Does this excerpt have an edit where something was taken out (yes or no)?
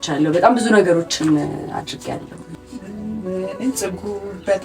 yes